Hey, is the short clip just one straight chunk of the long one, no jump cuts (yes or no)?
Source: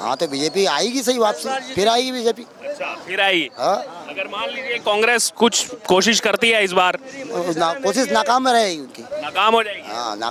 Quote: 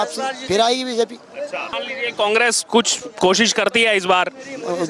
no